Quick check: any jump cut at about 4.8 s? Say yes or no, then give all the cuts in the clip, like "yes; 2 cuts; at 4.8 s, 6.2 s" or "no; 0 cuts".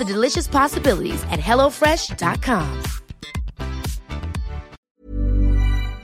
yes; 1 cut; at 4.8 s